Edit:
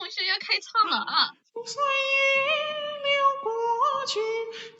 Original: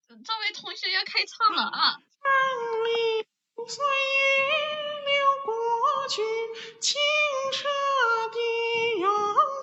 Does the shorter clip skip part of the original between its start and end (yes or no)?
yes